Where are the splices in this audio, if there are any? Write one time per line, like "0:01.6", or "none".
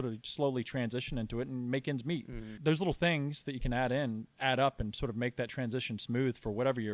0:02.4